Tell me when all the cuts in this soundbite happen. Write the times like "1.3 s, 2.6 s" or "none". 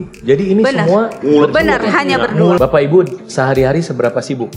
2.6 s